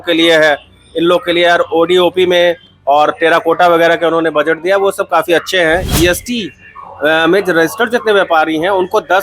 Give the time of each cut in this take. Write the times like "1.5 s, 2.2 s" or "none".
5.9 s